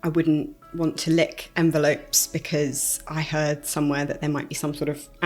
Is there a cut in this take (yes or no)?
no